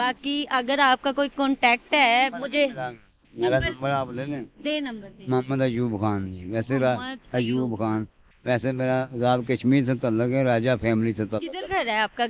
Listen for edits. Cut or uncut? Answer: uncut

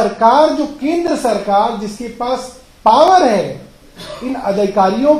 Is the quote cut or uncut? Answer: uncut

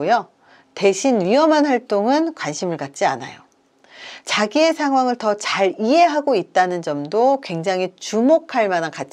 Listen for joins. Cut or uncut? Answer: uncut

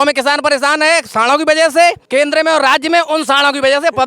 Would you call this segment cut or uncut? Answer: cut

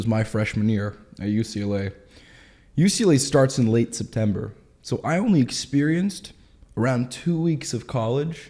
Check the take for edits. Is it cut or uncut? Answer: uncut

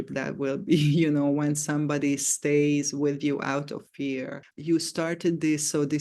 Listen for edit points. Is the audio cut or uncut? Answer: cut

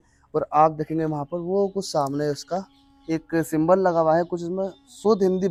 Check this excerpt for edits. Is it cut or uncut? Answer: uncut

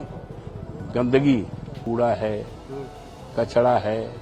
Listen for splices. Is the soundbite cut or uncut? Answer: cut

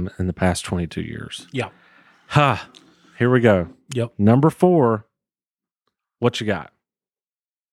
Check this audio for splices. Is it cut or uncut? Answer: uncut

